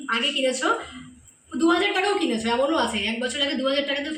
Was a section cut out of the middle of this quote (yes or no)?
no